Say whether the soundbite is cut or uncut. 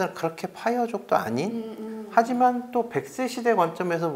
uncut